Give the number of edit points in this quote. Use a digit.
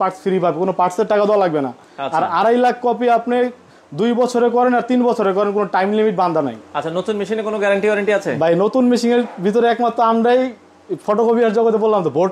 0